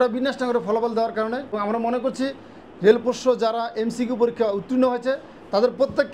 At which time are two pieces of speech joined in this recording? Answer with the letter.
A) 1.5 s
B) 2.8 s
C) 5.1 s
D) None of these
A